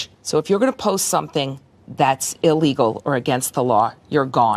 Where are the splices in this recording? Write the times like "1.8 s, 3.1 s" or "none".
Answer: none